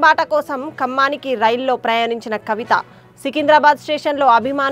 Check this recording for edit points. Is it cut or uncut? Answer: uncut